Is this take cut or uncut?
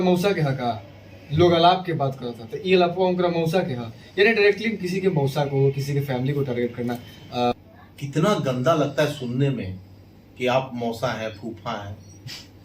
cut